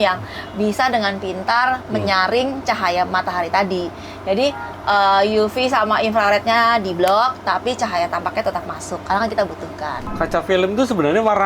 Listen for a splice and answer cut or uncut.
cut